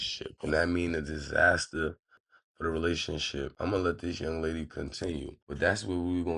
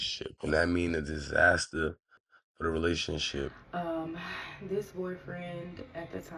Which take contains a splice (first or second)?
second